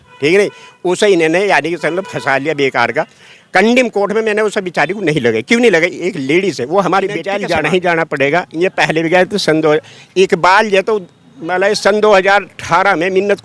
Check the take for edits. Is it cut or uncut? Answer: cut